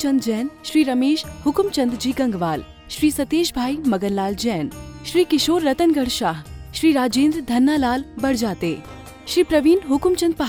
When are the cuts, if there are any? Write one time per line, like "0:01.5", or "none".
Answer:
none